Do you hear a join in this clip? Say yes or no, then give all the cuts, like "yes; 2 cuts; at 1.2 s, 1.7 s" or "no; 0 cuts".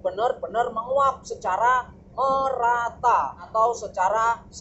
yes; 1 cut; at 3.4 s